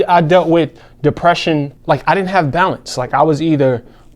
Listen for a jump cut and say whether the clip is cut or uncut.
cut